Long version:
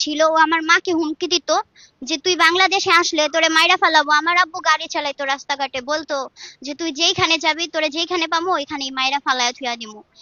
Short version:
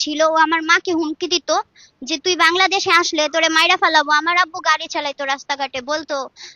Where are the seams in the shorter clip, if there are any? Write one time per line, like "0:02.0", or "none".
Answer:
none

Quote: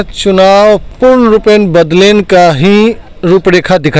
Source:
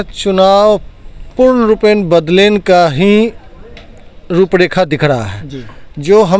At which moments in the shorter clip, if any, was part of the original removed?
0:00.9
0:03.1

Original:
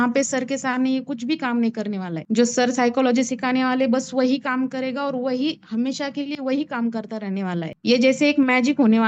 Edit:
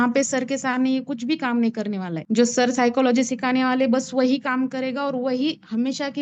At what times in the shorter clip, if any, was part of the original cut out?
none

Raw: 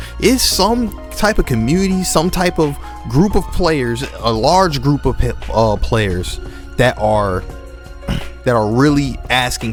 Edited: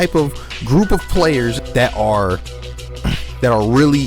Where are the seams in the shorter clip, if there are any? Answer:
0:01.6

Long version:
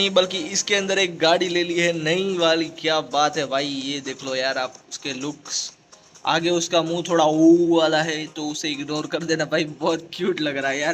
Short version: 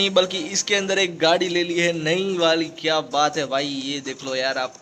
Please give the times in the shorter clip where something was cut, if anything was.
none

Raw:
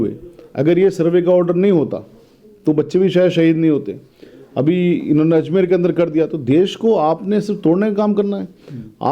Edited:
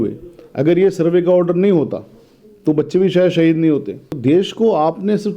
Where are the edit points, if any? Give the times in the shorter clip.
0:04.1

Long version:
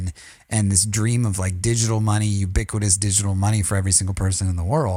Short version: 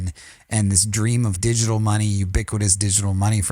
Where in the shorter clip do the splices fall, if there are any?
0:01.4

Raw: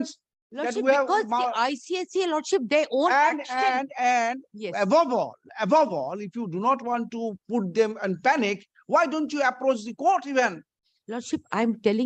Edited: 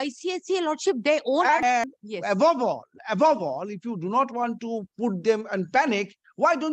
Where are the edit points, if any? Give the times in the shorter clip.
0:01.9

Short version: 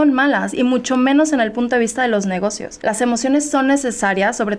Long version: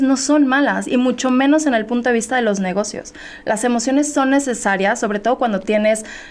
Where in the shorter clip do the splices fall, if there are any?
0:02.7

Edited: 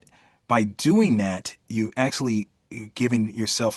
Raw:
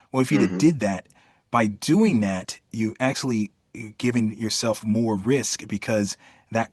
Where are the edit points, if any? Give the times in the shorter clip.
none

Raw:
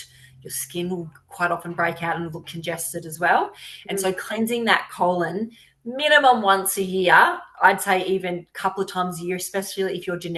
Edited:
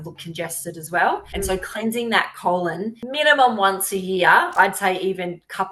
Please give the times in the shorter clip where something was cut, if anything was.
0:01.3
0:03.0
0:04.5

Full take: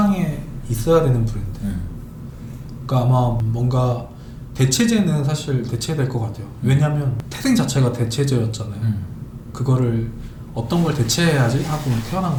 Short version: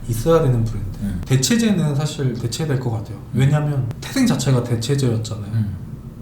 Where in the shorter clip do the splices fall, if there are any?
0:01.2

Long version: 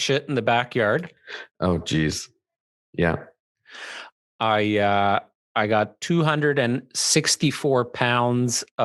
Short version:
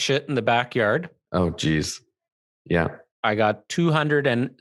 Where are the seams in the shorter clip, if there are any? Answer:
0:01.2
0:03.1

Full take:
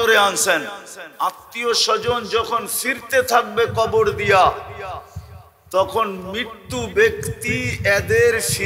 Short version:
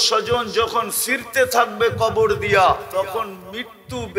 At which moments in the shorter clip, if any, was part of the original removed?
0:02.9

